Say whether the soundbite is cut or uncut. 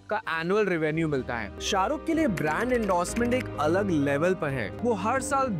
cut